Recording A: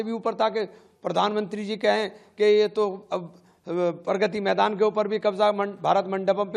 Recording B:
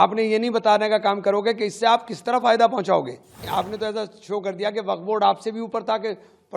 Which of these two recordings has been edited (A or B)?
B